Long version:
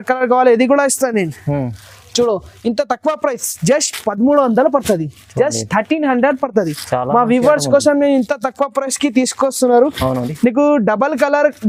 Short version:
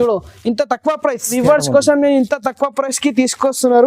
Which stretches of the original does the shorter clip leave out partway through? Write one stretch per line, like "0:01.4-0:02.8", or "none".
0:03.5-0:07.3